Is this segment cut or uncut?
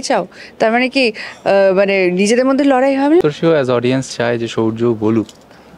cut